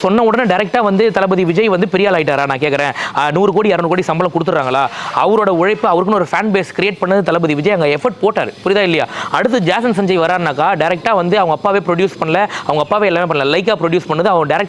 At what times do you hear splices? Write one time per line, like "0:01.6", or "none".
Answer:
none